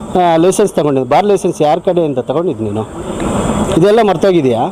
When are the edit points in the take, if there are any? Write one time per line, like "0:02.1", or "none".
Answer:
none